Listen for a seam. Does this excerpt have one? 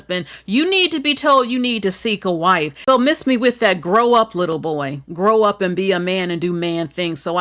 yes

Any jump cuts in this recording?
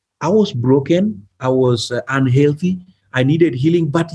yes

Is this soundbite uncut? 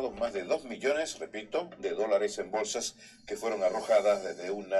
yes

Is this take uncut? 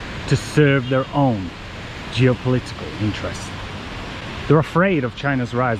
yes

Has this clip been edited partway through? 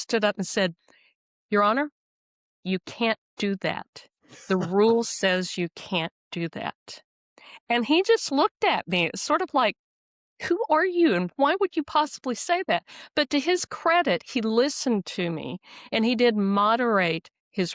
no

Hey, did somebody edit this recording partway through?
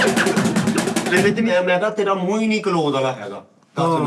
yes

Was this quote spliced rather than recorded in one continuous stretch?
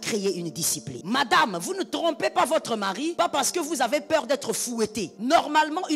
yes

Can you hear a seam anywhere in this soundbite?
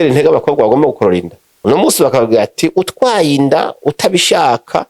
yes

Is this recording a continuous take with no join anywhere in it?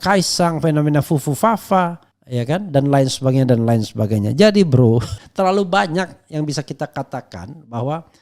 no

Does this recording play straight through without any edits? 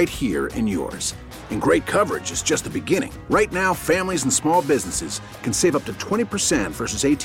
yes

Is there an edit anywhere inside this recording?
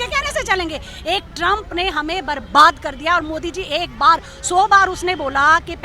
no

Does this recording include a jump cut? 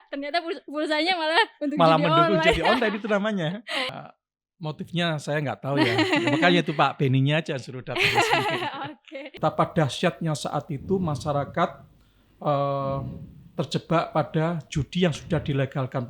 yes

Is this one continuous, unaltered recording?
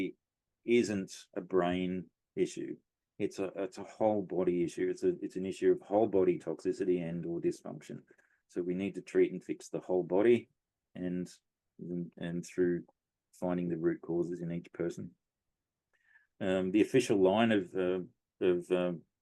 yes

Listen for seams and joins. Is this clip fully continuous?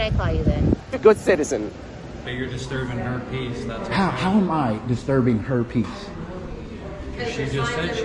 no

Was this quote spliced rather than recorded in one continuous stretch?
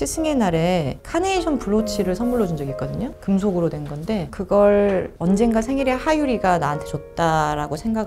no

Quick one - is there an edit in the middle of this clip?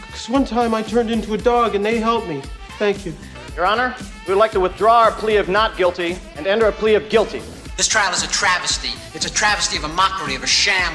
no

